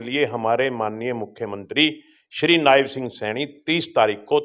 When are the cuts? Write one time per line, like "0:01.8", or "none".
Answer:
none

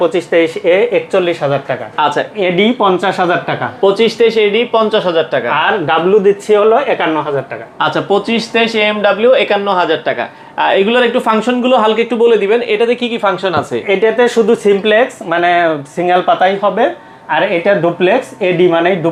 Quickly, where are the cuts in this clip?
none

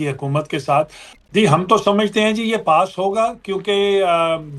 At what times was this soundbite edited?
0:01.0

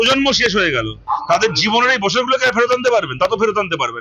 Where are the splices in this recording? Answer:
0:00.9

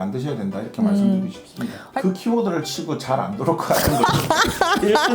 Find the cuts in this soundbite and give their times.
0:01.8

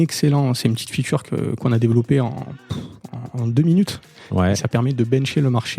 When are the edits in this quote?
0:04.2

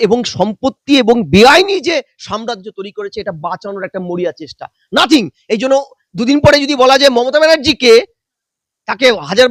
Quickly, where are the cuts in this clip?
none

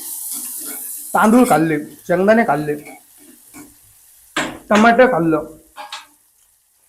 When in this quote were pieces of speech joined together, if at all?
none

